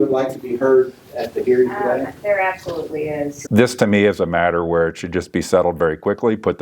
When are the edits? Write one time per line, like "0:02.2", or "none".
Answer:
0:03.3